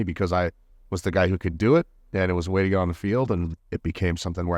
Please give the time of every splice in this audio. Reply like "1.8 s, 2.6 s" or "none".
3.6 s

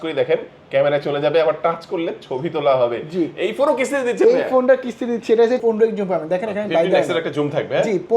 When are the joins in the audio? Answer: 5.6 s

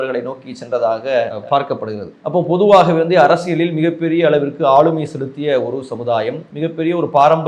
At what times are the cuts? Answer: 6.5 s

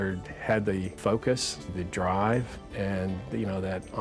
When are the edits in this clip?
1.0 s, 1.7 s, 2.6 s

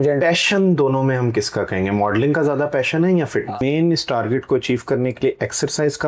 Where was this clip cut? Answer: 3.6 s

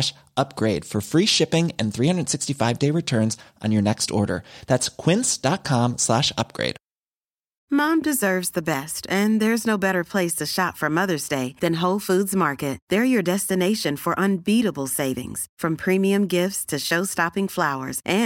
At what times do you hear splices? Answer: none

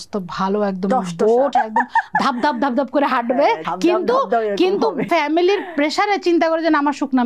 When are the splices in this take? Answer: 1.5 s, 3.7 s, 5.1 s

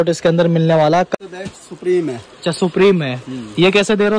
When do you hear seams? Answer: 1.1 s

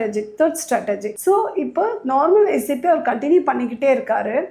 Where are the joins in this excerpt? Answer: none

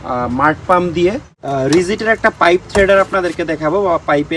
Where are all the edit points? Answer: 1.3 s

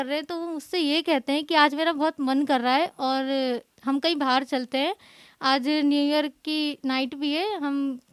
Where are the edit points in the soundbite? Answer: none

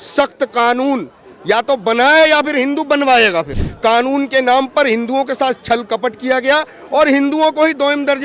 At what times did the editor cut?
3.6 s

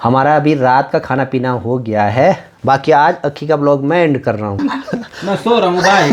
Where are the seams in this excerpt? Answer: 4.6 s

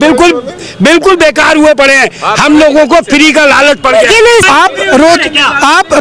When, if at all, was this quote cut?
4.4 s

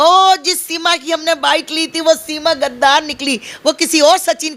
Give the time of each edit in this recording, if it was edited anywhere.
none

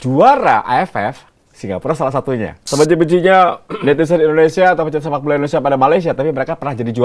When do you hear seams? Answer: 2.6 s

